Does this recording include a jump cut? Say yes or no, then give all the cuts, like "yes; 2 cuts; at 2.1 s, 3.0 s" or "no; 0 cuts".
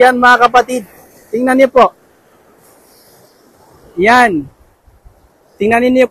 no; 0 cuts